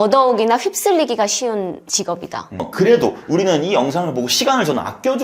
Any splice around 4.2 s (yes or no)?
no